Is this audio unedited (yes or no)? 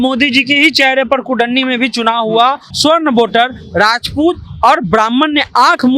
no